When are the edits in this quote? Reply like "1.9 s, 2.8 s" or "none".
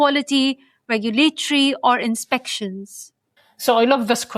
none